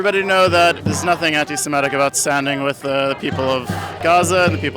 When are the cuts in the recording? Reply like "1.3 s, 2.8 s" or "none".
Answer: 2.8 s, 3.9 s

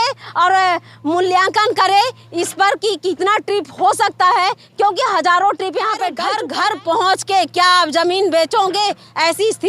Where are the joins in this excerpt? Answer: 6.2 s

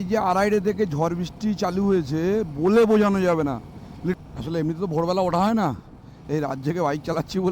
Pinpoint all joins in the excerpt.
4.2 s

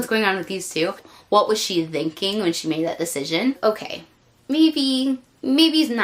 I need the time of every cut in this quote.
1.0 s, 3.6 s

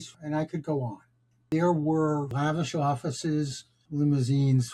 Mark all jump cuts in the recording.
1.3 s, 2.3 s

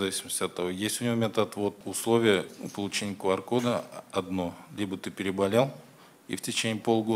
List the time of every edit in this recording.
1.8 s

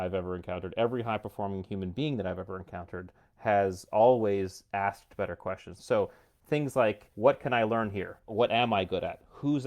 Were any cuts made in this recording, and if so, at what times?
5.8 s, 7.1 s, 8.3 s

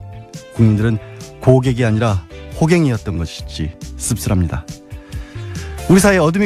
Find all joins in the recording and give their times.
none

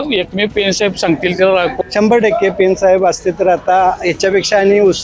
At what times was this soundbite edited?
1.7 s

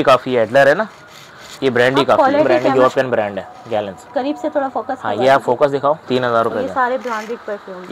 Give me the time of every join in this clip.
2.5 s, 6.1 s

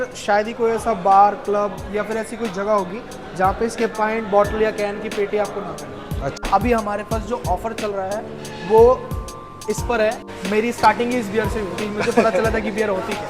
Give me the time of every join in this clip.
6.4 s, 10.3 s

